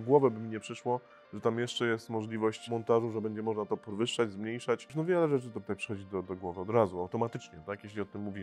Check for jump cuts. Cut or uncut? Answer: cut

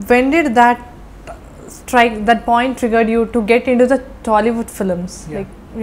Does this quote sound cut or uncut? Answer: uncut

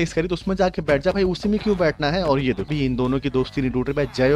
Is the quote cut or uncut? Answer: cut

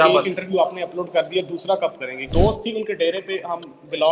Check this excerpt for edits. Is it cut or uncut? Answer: cut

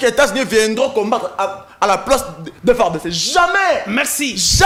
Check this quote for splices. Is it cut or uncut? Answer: uncut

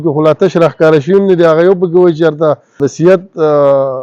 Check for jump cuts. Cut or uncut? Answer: cut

